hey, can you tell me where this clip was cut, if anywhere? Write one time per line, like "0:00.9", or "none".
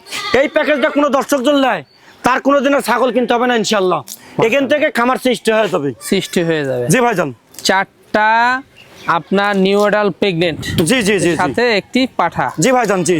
none